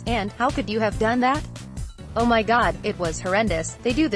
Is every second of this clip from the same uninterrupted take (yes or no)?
no